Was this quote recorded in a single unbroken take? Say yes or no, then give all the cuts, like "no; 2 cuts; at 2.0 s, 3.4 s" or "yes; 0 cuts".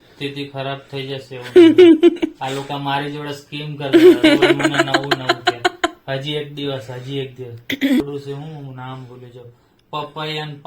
no; 1 cut; at 8.0 s